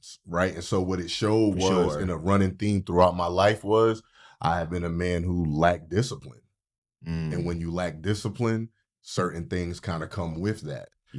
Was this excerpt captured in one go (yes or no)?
yes